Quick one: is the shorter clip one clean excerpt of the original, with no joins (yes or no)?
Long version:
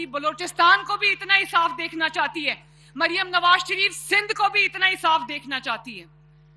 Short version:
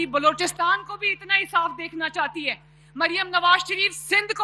yes